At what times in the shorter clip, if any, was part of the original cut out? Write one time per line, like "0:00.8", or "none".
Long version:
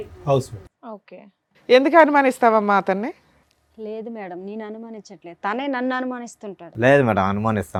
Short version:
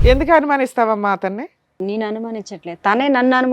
0:01.8